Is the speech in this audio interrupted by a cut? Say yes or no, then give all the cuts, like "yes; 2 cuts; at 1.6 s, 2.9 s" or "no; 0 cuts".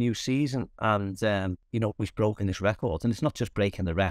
yes; 1 cut; at 1.6 s